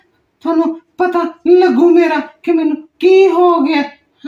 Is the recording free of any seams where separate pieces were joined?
yes; 0 cuts

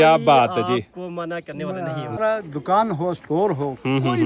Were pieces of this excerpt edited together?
yes; 1 cut; at 2.2 s

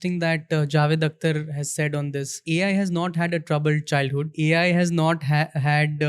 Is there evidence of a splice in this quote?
yes; 2 cuts; at 2.4 s, 4.3 s

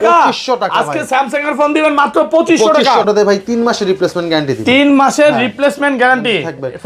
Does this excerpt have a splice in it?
yes; 1 cut; at 3.0 s

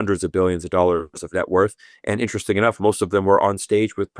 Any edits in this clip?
no; 0 cuts

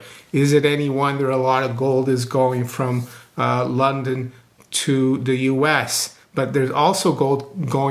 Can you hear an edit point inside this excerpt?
no; 0 cuts

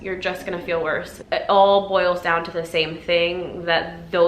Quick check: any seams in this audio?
yes; 1 cut; at 1.2 s

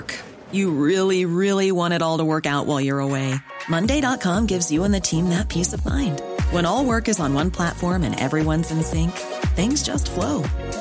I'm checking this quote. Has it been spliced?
no; 0 cuts

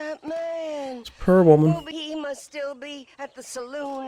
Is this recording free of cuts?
no; 1 cut; at 1.9 s

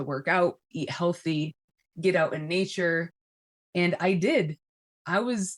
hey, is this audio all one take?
yes; 0 cuts

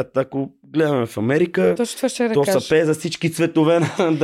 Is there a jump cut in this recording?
no; 0 cuts

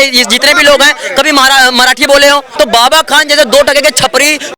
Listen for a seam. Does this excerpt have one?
yes; 1 cut; at 2.5 s

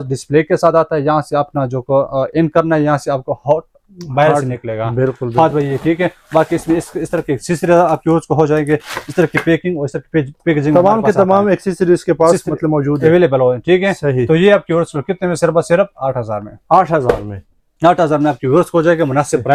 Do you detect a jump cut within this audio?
no; 0 cuts

